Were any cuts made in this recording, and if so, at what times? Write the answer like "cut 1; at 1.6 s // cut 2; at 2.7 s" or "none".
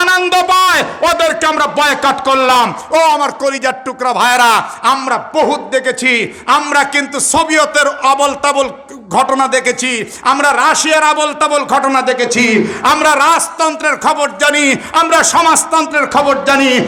none